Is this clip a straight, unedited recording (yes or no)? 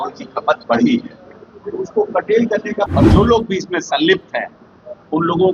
no